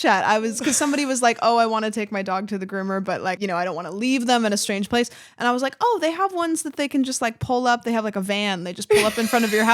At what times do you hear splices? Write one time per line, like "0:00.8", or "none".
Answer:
0:03.4